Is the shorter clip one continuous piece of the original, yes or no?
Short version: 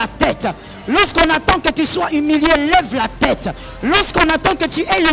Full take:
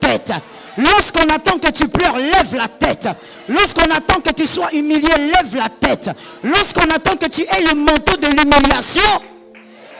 yes